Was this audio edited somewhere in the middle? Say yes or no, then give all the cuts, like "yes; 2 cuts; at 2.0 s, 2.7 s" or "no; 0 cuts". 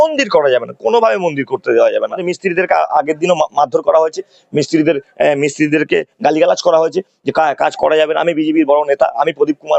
yes; 1 cut; at 2.3 s